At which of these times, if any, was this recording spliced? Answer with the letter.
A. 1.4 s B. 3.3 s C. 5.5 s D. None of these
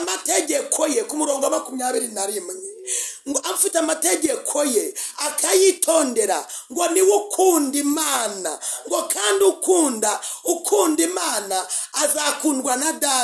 D